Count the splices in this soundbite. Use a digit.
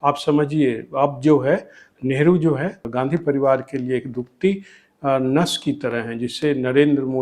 1